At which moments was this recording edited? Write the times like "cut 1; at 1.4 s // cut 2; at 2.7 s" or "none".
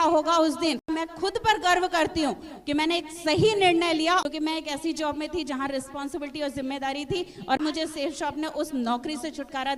cut 1; at 0.9 s // cut 2; at 4.2 s // cut 3; at 7.6 s